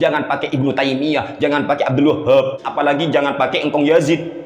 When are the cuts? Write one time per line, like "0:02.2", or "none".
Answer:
0:02.7